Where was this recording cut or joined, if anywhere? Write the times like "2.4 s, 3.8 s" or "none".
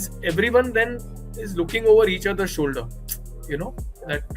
none